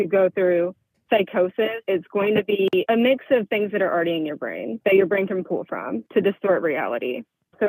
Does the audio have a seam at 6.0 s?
yes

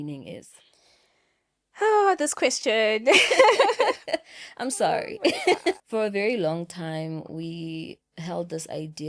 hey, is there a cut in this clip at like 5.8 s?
yes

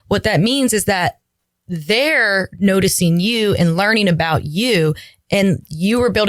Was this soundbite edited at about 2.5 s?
no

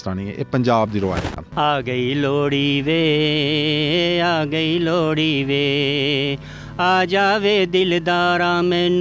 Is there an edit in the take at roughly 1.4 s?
yes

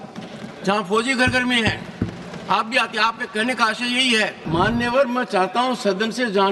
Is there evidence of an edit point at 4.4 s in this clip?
yes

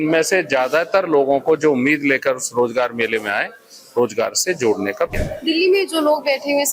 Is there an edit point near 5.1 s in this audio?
yes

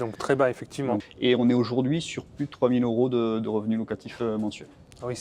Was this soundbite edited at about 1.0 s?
yes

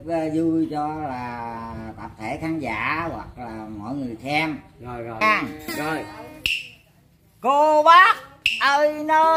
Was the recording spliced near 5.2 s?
yes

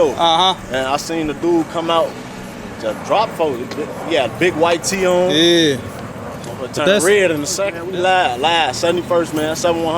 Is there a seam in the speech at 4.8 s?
no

